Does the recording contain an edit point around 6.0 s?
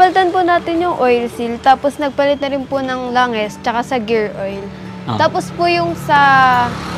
no; 0 cuts

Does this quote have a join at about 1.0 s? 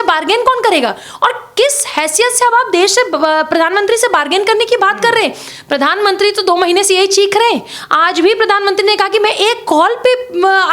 no; 0 cuts

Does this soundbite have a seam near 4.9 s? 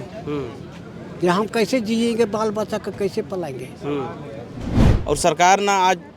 yes; 1 cut; at 4.9 s

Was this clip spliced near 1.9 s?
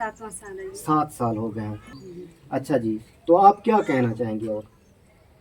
yes; 1 cut; at 1.9 s

